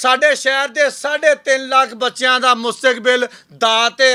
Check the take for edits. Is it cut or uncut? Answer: uncut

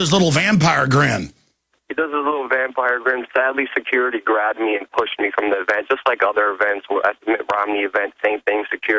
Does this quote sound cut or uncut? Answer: cut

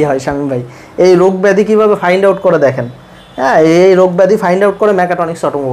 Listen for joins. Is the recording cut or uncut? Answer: uncut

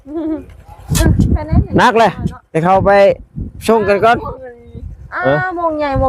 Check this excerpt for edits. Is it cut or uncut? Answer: uncut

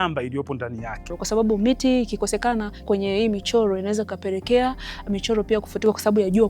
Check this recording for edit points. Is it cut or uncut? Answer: cut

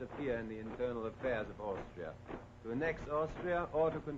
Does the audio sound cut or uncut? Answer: uncut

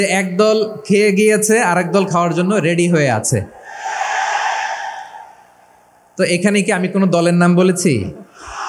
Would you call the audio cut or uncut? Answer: uncut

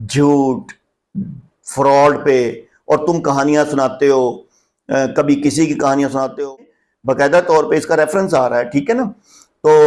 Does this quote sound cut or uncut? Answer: cut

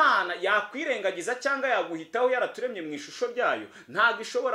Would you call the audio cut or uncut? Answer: uncut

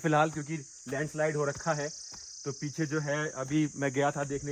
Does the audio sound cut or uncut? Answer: uncut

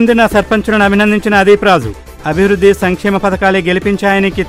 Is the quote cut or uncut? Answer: uncut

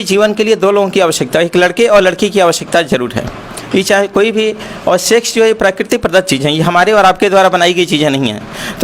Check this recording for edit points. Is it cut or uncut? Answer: uncut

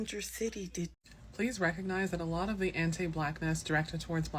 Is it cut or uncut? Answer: cut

